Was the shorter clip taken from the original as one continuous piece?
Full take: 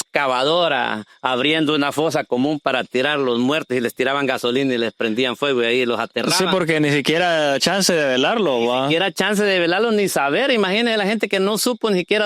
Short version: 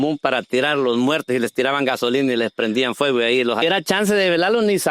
no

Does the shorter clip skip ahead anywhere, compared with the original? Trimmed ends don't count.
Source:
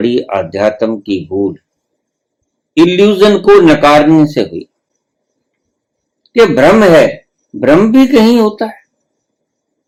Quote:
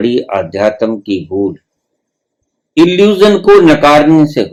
no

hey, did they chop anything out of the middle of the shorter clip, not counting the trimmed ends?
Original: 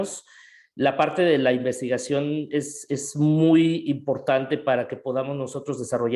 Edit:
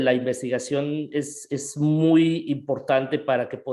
no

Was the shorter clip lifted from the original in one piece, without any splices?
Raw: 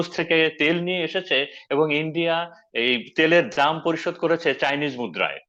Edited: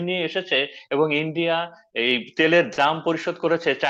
yes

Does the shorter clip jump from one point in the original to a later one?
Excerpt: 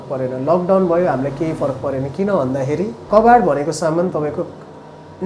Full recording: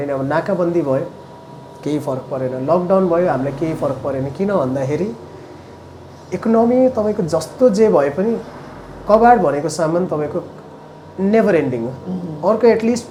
yes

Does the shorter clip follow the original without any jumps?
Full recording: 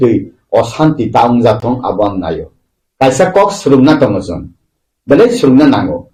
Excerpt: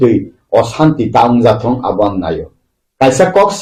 yes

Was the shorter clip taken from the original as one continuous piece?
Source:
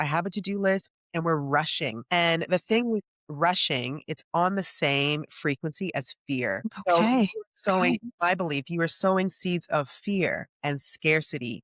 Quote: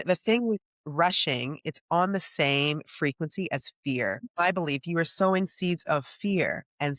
no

